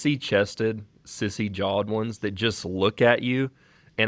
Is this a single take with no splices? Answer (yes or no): yes